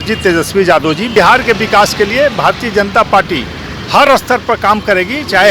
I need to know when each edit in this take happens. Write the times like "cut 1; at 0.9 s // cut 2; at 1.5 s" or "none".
cut 1; at 1.1 s

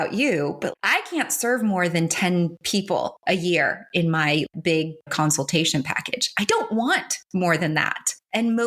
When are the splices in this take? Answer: cut 1; at 2.9 s // cut 2; at 4.5 s

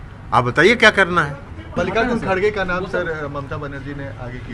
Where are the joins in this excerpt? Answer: cut 1; at 1.7 s

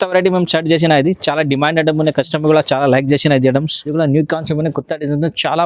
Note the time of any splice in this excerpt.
cut 1; at 3.8 s

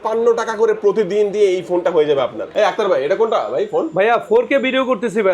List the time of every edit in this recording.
cut 1; at 2.4 s

